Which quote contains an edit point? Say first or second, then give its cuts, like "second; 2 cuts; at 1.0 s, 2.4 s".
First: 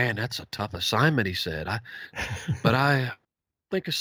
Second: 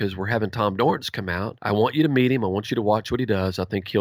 second; 1 cut; at 1.5 s